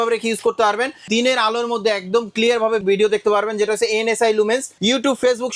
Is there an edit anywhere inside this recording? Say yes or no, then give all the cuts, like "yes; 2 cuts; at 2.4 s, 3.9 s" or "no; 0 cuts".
yes; 3 cuts; at 1.0 s, 2.8 s, 4.7 s